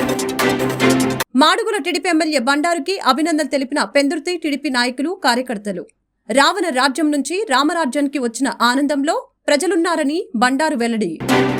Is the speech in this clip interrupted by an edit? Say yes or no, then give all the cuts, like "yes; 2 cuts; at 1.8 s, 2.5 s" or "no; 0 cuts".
no; 0 cuts